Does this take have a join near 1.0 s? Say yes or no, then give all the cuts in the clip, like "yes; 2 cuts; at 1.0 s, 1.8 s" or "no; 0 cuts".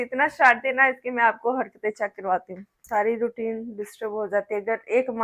no; 1 cut; at 2.8 s